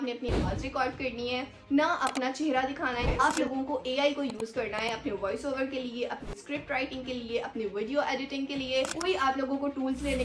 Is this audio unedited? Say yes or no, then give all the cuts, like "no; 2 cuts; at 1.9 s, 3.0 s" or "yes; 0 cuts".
no; 2 cuts; at 3.1 s, 8.9 s